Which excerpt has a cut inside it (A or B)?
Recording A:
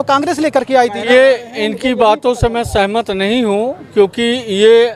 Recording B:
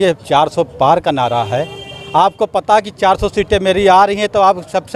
A